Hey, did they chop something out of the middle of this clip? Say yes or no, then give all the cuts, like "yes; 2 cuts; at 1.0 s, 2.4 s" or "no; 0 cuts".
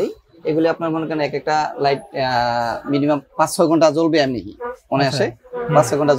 no; 0 cuts